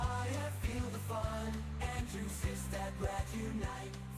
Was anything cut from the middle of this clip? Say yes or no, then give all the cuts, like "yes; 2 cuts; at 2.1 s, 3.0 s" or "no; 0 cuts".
no; 0 cuts